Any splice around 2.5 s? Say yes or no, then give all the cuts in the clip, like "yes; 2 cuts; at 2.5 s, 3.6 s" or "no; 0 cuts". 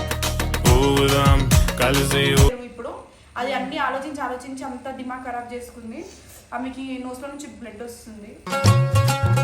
yes; 1 cut; at 2.5 s